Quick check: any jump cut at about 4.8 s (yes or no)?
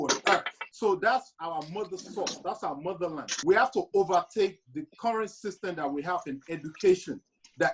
no